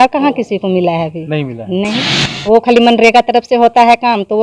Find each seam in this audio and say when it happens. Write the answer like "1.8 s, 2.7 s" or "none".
none